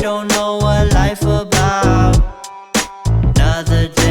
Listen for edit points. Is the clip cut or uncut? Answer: uncut